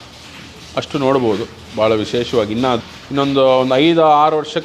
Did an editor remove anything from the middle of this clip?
yes; 1 cut; at 2.8 s

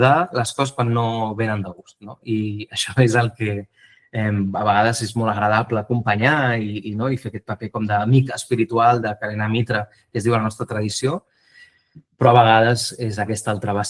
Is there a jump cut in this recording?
no; 0 cuts

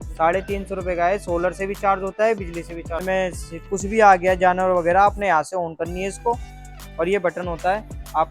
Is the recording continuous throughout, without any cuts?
no; 1 cut; at 3.0 s

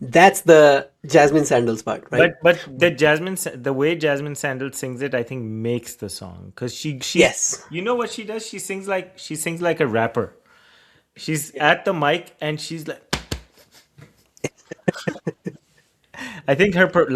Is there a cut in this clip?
no; 0 cuts

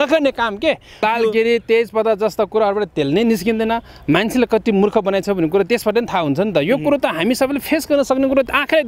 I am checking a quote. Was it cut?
yes; 1 cut; at 1.0 s

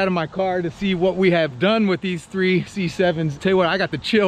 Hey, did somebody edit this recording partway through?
yes; 1 cut; at 3.4 s

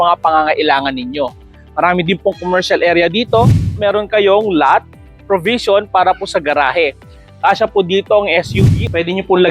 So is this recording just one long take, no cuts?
no; 2 cuts; at 3.8 s, 8.5 s

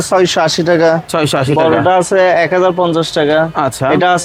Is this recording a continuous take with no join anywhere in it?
yes; 0 cuts

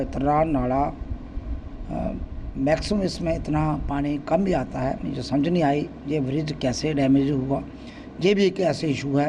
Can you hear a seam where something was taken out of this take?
no; 0 cuts

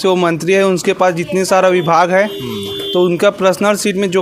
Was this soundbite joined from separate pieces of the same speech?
no; 0 cuts

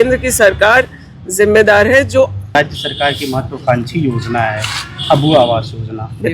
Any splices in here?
yes; 1 cut; at 2.6 s

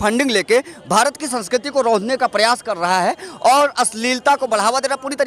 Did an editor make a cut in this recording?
no; 0 cuts

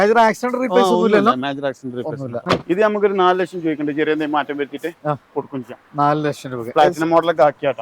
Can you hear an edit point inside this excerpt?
yes; 1 cut; at 2.4 s

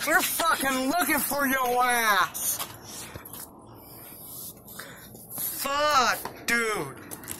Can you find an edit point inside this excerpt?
no; 0 cuts

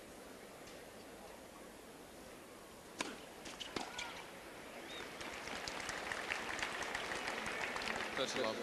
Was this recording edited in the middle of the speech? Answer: no; 0 cuts

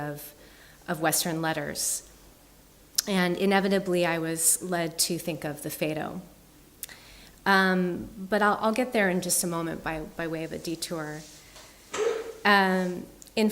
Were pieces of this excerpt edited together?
yes; 1 cut; at 6.7 s

